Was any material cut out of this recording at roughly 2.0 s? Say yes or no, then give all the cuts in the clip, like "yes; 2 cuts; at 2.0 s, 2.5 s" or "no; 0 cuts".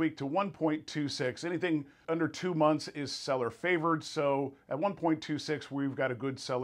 yes; 1 cut; at 2.0 s